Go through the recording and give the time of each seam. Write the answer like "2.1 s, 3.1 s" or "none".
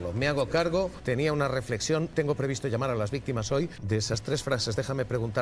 1.0 s, 2.1 s, 3.8 s